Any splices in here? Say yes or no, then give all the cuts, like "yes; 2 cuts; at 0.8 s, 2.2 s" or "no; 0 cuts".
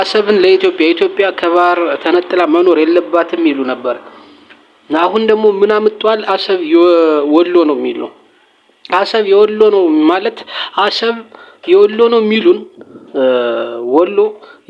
no; 0 cuts